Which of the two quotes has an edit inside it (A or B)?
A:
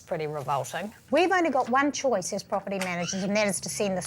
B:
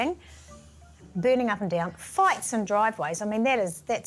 A